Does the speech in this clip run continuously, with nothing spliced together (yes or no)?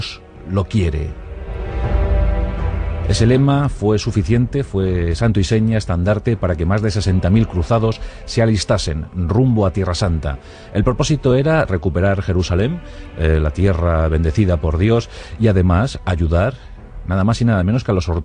no